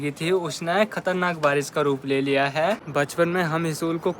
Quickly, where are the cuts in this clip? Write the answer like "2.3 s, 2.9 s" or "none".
2.8 s